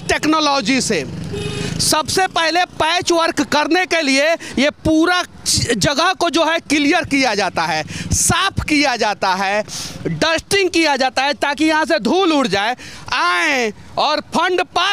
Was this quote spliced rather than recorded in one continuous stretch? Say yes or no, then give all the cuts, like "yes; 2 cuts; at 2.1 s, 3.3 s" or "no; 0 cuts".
no; 0 cuts